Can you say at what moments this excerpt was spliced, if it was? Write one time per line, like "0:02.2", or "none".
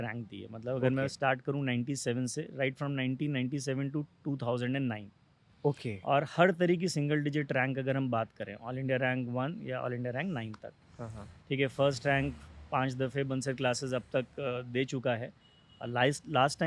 none